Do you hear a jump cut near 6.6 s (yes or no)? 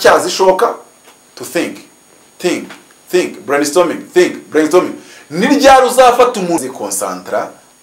yes